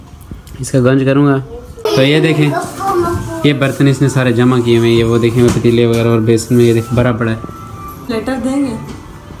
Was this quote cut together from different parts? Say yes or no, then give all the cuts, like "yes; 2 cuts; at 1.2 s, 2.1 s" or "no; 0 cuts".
yes; 2 cuts; at 1.7 s, 8.1 s